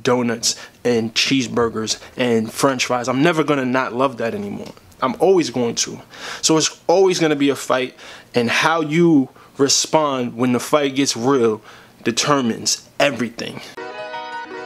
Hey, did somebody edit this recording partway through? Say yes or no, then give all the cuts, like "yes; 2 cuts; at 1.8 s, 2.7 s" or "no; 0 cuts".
yes; 1 cut; at 13.7 s